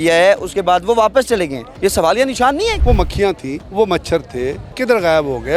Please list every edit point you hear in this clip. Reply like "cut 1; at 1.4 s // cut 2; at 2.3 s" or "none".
cut 1; at 1.7 s // cut 2; at 3.0 s // cut 3; at 4.7 s